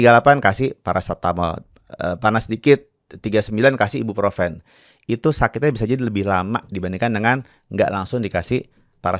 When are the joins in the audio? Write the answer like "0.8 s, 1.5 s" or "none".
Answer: none